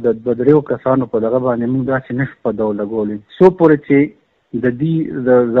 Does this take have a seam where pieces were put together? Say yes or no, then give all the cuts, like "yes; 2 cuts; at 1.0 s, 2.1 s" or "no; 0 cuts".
no; 0 cuts